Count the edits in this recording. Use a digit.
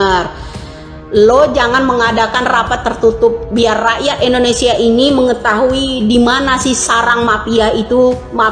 0